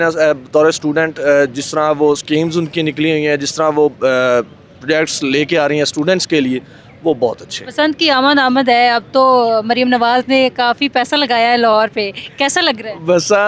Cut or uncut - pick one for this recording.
uncut